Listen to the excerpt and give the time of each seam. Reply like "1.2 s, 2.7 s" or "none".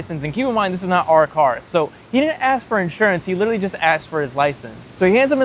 none